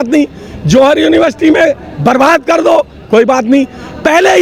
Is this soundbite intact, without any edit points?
yes; 0 cuts

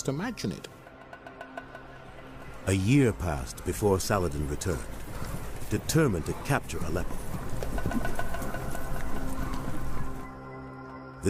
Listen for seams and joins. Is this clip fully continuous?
yes; 0 cuts

